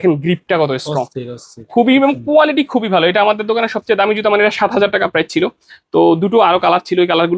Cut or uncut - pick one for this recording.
uncut